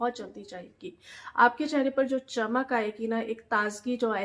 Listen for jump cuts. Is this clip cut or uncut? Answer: uncut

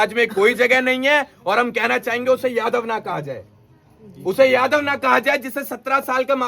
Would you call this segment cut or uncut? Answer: uncut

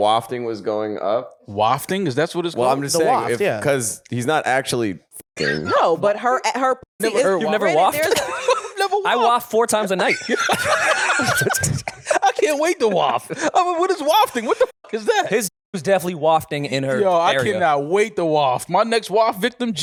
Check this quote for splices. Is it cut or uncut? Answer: uncut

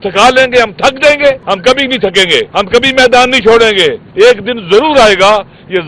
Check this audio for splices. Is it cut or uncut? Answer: cut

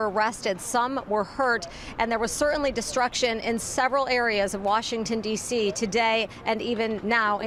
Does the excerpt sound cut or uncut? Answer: uncut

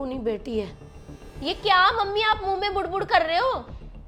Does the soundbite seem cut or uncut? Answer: uncut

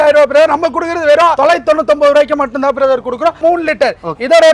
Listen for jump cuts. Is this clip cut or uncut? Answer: cut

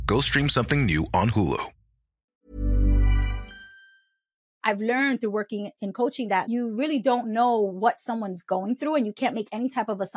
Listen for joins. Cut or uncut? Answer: cut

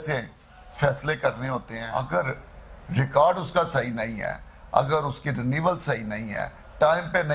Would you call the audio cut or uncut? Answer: cut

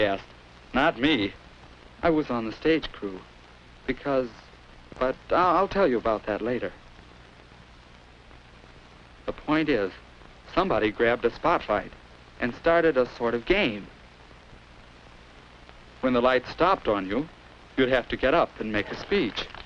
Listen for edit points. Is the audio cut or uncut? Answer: cut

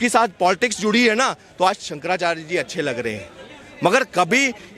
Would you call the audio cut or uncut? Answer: uncut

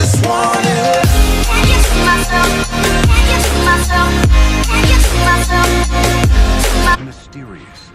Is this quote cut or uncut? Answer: uncut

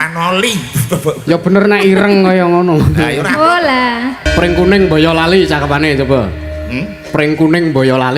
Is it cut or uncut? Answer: cut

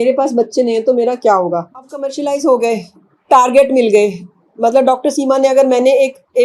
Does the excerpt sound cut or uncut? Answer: cut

